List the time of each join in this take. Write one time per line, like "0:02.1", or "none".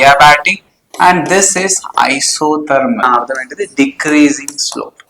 0:03.0